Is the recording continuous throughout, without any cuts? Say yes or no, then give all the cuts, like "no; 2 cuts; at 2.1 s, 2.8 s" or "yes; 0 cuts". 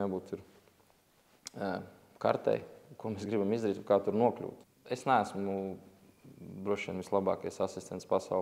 no; 1 cut; at 4.5 s